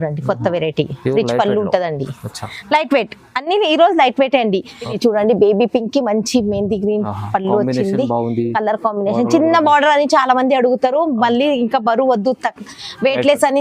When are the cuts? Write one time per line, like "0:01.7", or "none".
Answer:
0:04.8